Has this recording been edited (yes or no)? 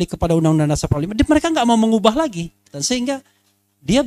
yes